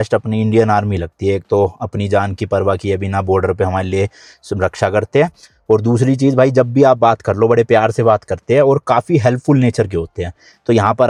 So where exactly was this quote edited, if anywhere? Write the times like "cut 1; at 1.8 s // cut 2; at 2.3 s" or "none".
none